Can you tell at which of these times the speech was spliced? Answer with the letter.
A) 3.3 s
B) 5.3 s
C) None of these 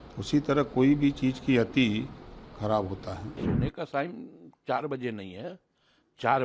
A